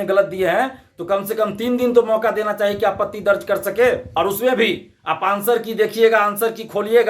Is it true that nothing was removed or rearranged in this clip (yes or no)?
no